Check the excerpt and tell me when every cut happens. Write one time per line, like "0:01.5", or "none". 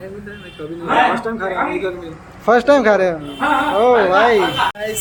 none